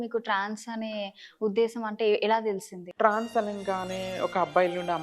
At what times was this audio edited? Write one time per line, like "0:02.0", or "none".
0:02.8